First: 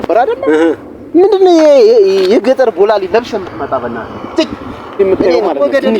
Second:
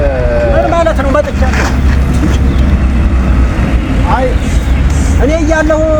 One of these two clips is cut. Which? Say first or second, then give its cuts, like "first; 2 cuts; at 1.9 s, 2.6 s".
first; 1 cut; at 4.9 s